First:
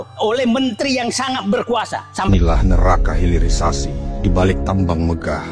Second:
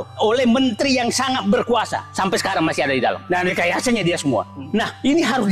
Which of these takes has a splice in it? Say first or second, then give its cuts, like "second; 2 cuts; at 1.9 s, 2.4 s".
first; 1 cut; at 2.3 s